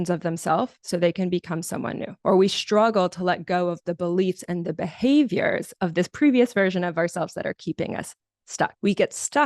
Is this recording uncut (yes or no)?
yes